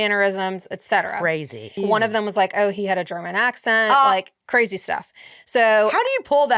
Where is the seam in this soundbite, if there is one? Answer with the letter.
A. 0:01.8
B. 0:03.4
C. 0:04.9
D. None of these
A